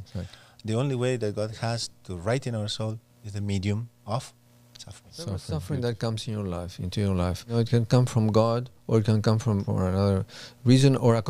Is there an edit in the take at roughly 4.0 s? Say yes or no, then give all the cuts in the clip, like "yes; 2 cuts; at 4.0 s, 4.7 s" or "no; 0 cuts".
no; 3 cuts; at 5.6 s, 7.5 s, 9.7 s